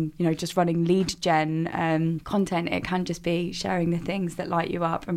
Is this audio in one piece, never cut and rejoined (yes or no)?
no